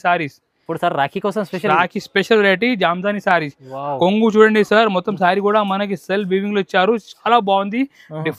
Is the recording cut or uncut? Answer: uncut